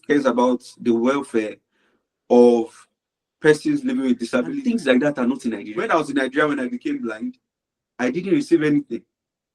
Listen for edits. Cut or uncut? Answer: cut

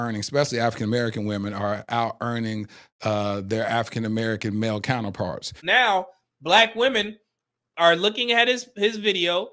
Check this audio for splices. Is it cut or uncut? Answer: cut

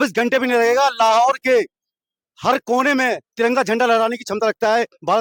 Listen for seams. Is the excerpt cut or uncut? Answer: uncut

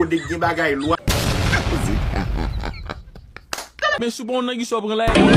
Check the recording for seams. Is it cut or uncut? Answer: cut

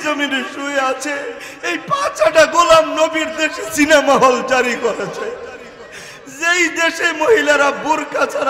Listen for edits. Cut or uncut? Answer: uncut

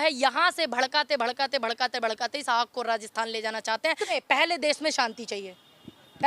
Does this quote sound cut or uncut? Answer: cut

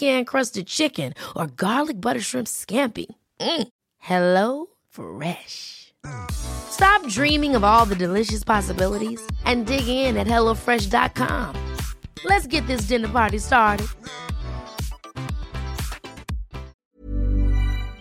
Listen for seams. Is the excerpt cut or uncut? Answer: cut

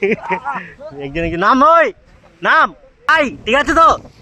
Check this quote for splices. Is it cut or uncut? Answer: cut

